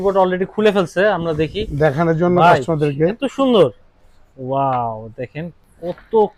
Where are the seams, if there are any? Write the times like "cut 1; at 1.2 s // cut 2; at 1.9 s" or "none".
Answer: none

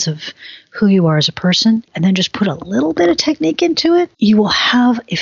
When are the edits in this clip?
cut 1; at 1.9 s // cut 2; at 4.1 s

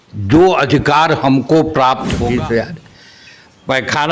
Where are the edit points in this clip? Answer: cut 1; at 2.2 s

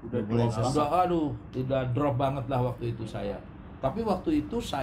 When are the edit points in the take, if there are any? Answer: none

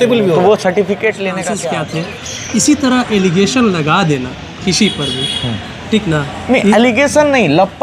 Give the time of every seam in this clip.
cut 1; at 1.6 s

